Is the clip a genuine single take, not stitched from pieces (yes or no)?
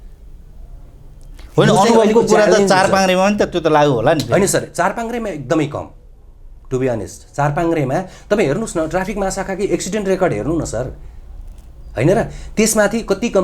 yes